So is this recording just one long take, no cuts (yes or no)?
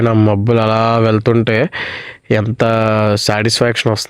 yes